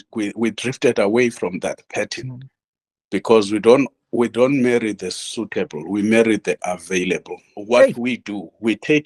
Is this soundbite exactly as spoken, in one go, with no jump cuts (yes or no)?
no